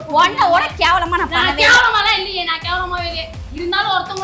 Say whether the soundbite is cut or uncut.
uncut